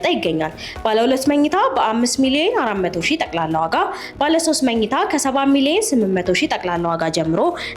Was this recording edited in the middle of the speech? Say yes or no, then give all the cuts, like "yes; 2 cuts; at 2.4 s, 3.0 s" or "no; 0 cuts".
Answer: no; 0 cuts